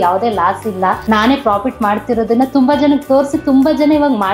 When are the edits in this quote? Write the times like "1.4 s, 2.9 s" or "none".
1.0 s